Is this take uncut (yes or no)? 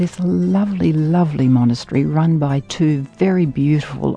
yes